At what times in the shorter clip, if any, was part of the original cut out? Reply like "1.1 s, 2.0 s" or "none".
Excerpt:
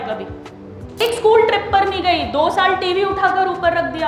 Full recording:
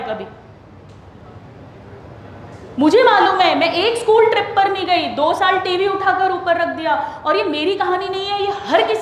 1.0 s

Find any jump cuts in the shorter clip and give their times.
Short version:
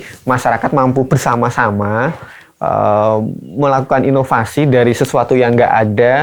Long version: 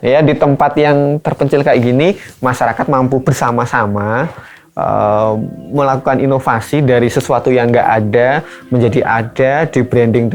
none

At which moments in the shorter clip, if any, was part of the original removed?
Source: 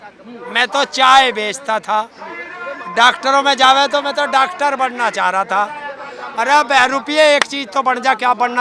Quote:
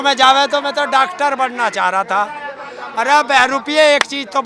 none

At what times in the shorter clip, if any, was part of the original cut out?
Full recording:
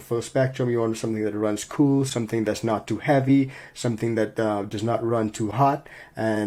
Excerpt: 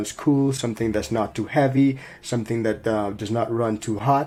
none

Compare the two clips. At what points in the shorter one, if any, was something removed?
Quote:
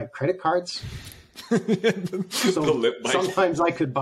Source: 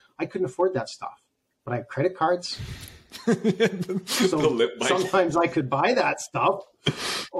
none

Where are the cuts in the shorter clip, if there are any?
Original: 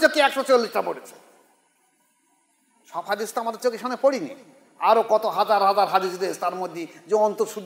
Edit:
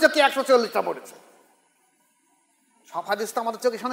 none

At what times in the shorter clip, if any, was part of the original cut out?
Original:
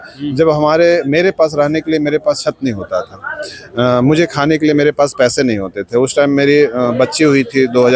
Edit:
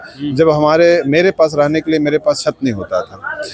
none

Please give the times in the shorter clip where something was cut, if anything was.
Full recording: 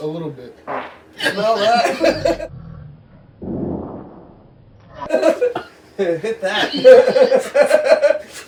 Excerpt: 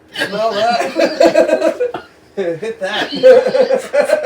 1.5 s

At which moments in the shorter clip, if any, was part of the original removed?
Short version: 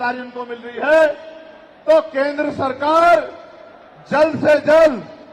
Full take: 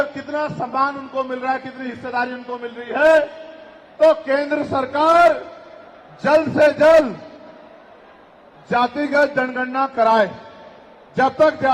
none

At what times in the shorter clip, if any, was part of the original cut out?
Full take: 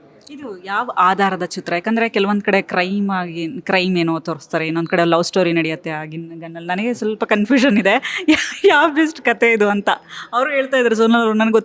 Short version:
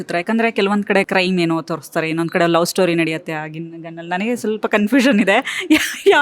1.1 s

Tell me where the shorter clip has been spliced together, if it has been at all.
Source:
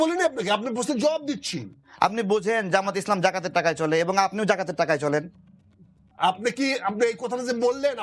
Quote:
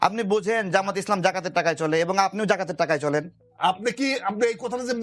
3.4 s

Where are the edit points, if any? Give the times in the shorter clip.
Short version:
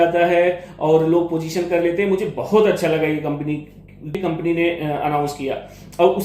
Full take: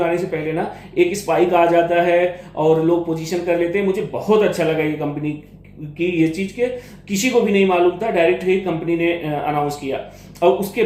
4.2 s

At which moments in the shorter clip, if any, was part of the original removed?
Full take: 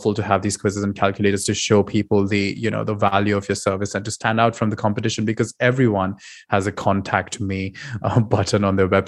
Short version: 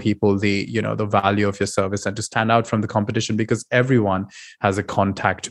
none

